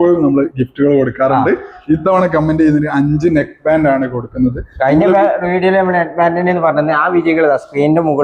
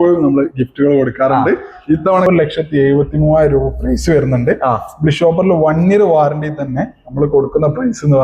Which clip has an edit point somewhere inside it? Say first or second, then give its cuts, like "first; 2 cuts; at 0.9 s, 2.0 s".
second; 1 cut; at 2.2 s